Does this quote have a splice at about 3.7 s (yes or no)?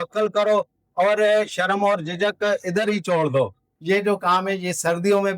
yes